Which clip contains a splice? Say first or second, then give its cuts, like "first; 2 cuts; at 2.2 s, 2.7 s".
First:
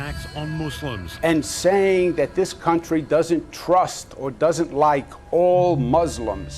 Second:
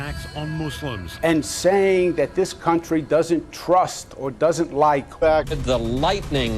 first; 1 cut; at 5.2 s